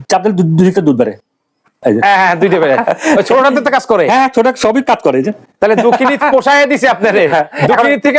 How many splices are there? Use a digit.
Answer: 0